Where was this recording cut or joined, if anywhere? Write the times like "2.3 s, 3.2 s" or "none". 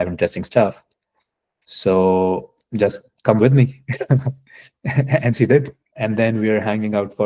5.8 s